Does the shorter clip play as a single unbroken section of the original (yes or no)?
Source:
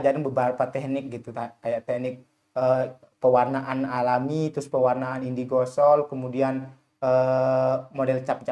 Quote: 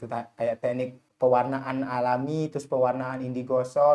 no